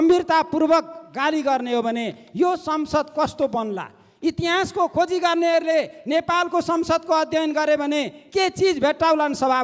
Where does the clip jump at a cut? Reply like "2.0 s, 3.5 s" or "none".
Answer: none